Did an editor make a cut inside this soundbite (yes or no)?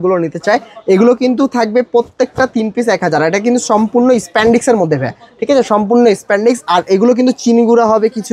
no